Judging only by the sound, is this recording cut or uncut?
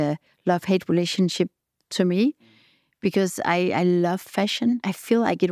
uncut